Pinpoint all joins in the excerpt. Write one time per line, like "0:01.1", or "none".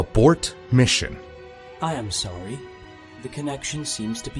0:01.4